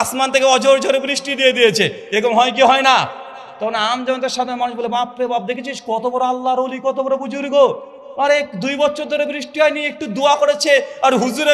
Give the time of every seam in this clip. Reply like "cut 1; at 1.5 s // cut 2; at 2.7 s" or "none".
none

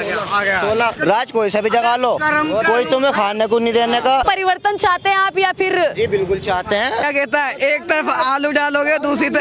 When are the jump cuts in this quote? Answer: cut 1; at 1.0 s // cut 2; at 4.2 s // cut 3; at 7.0 s

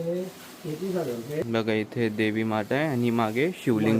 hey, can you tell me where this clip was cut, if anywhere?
cut 1; at 1.5 s

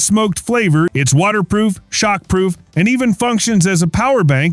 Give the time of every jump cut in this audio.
cut 1; at 0.9 s

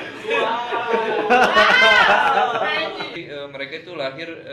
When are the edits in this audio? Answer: cut 1; at 3.2 s

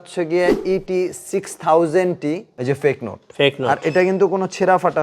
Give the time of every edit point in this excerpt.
cut 1; at 2.5 s

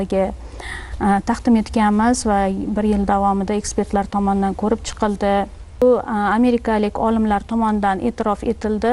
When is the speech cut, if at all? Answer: cut 1; at 5.8 s

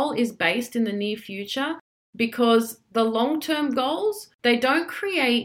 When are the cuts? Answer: cut 1; at 4.3 s

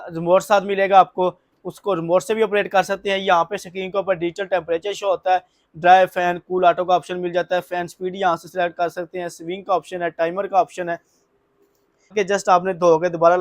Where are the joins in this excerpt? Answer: cut 1; at 12.1 s

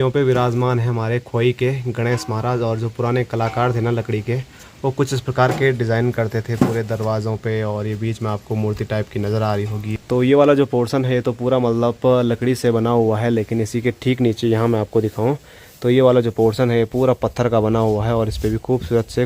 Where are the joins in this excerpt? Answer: none

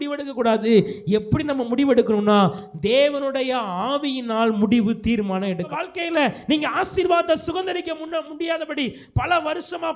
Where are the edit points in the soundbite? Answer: cut 1; at 5.7 s

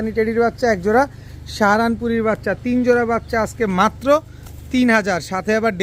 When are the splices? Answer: none

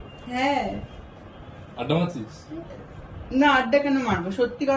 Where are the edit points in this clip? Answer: none

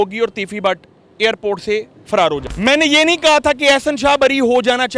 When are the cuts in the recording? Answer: cut 1; at 2.0 s

